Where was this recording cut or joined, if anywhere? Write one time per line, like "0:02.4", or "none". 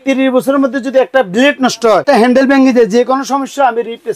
0:02.0